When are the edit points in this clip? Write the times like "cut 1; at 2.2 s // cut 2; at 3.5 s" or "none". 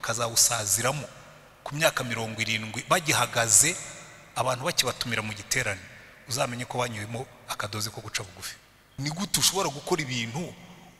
cut 1; at 9.0 s